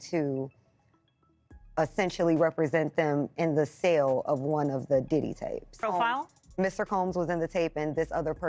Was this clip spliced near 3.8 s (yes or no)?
no